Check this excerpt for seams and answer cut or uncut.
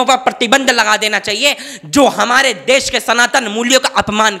uncut